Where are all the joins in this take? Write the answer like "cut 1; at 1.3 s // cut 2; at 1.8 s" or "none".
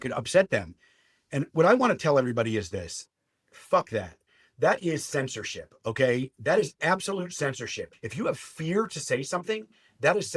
cut 1; at 7.8 s